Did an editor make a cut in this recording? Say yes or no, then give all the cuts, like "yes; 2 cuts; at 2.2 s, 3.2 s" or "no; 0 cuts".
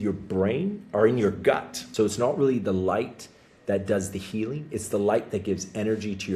yes; 1 cut; at 1.8 s